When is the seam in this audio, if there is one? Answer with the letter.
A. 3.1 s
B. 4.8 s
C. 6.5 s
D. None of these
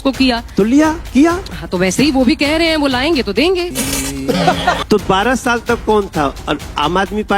B